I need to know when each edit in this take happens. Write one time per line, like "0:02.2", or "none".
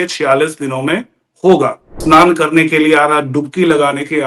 0:01.9